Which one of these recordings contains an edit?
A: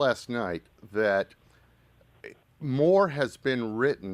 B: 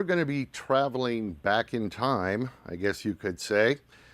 B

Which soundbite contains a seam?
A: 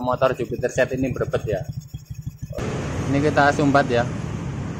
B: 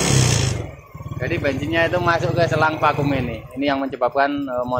A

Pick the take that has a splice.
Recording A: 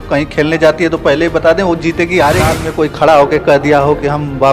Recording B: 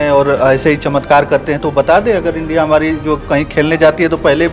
A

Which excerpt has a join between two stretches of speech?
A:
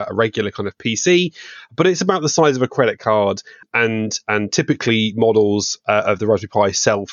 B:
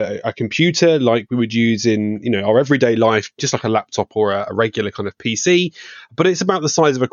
A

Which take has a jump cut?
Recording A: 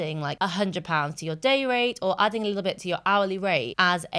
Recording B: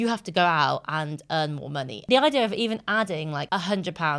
B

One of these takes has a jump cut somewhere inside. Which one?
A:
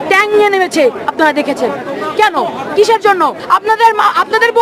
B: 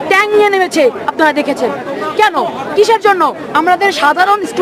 A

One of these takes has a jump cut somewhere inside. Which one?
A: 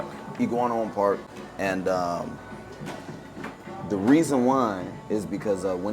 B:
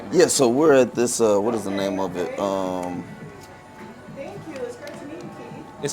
A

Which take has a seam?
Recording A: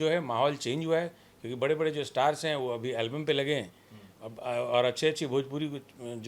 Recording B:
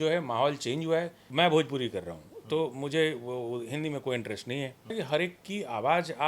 B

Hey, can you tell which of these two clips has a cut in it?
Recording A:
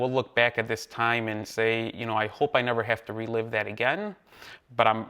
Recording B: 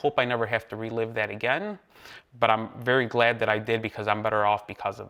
A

